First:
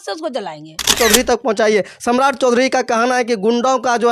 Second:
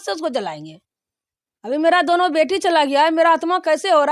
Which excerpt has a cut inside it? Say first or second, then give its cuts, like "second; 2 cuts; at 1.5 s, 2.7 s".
first; 1 cut; at 0.9 s